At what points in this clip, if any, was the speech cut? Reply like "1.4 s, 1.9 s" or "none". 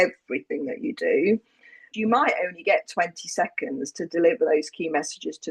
1.8 s